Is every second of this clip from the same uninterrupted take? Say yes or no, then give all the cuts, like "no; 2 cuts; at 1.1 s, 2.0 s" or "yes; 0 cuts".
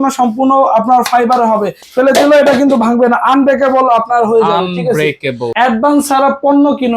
no; 2 cuts; at 1.8 s, 5.4 s